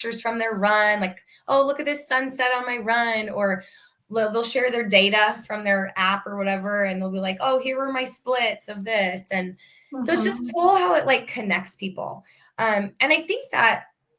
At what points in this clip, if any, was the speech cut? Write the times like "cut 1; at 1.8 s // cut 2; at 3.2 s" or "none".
none